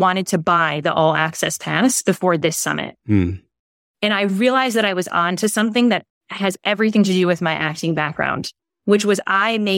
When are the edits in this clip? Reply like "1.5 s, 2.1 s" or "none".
none